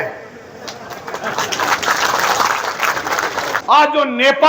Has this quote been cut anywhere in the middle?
yes; 1 cut; at 3.6 s

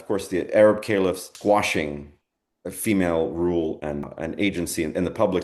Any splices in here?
yes; 2 cuts; at 1.3 s, 4.1 s

